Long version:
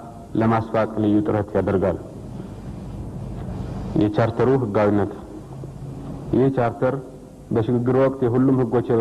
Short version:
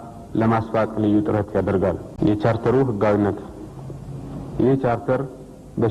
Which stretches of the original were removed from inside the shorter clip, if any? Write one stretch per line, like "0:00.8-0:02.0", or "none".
0:02.1-0:03.8